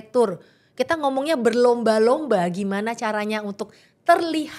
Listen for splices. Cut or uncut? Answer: uncut